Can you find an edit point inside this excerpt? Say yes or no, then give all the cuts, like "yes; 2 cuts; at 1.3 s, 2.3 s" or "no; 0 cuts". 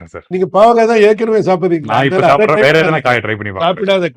no; 0 cuts